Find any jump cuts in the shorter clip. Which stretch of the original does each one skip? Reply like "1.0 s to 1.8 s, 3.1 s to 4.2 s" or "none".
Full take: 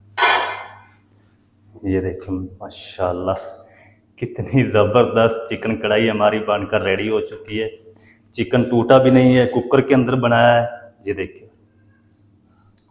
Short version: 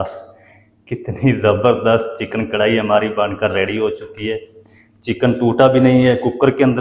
none